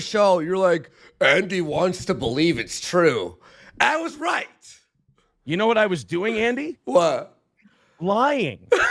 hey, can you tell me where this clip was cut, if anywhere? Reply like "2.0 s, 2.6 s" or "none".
none